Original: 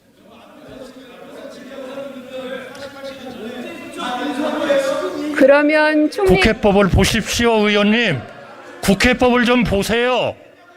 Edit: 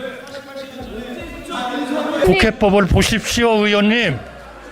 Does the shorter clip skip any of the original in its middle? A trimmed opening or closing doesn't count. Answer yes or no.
yes